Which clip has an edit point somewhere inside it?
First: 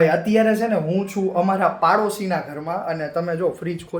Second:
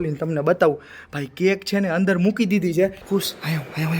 second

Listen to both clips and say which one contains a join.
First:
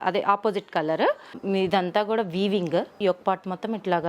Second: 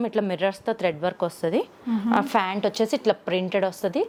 first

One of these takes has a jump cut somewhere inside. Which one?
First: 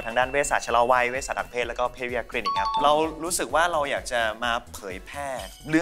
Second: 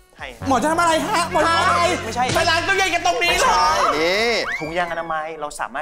first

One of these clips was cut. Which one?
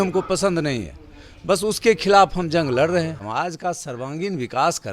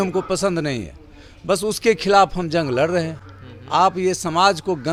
first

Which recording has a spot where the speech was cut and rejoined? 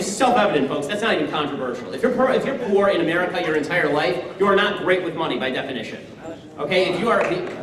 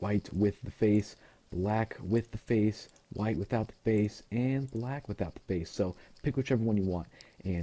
second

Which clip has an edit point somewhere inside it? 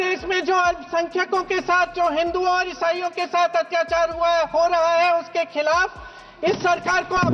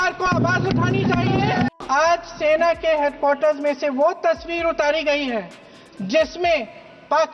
second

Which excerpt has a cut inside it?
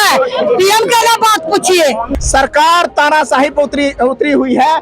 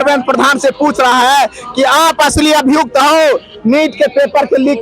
first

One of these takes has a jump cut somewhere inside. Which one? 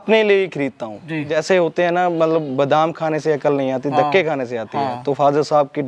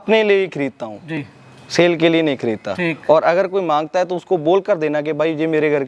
first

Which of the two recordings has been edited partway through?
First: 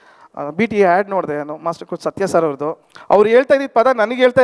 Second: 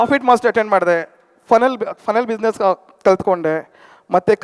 first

